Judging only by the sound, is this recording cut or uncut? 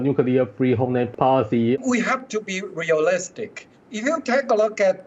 cut